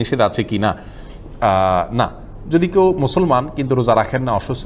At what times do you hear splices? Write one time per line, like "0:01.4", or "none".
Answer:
none